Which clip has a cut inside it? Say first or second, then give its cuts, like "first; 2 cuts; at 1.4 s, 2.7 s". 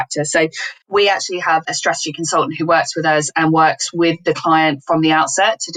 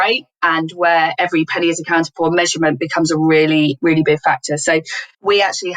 second; 1 cut; at 1.1 s